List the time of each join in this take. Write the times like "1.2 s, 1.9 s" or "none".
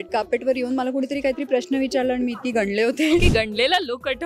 3.2 s